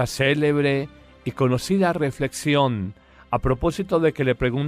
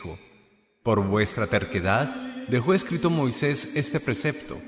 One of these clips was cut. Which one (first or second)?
first